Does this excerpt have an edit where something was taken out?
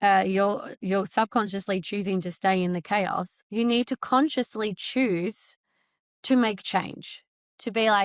yes; 1 cut; at 3.4 s

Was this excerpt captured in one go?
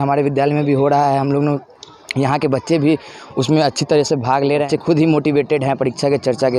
no; 1 cut; at 4.6 s

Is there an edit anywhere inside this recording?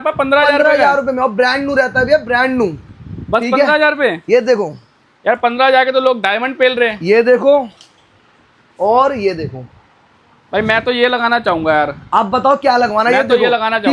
no; 0 cuts

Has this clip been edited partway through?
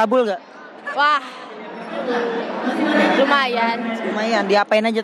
no; 0 cuts

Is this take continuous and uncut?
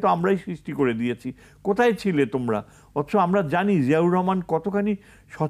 yes; 0 cuts

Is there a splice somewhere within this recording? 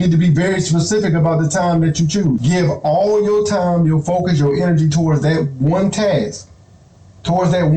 yes; 1 cut; at 2.4 s

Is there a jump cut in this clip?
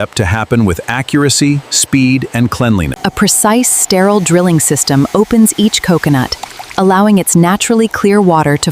no; 0 cuts

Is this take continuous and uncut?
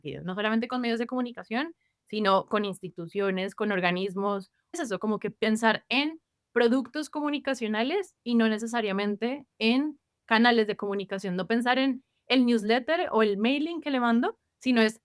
no; 1 cut; at 4.7 s

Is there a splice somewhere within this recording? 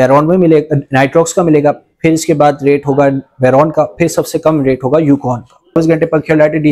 yes; 1 cut; at 5.7 s

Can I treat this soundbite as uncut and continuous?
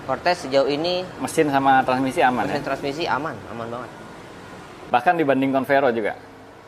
no; 1 cut; at 4.7 s

